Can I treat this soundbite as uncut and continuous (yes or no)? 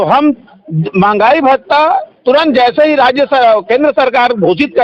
yes